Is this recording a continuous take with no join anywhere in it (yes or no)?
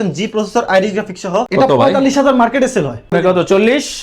no